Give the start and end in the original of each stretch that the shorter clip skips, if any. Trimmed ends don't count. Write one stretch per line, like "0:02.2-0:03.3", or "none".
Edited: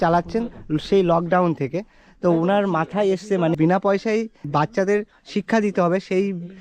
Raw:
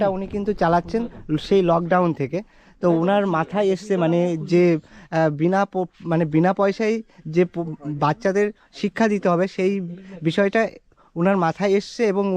0:04.1-0:06.3
0:07.1-0:07.9